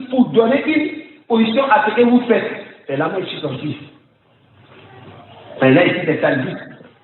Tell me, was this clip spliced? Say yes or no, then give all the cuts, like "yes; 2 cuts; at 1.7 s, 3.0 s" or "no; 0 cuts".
no; 0 cuts